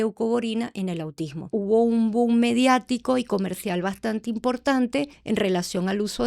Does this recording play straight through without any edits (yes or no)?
no